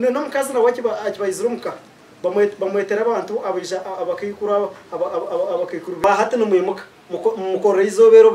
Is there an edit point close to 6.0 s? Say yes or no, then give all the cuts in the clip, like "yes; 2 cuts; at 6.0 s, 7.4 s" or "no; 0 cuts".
yes; 1 cut; at 6.0 s